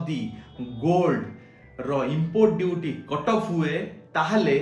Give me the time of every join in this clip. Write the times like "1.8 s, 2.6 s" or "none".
none